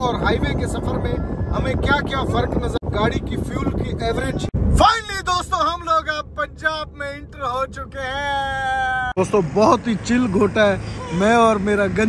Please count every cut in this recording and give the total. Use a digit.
3